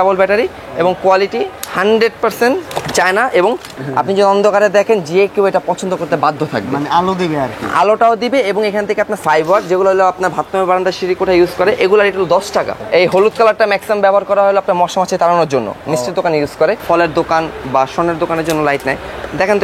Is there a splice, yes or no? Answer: yes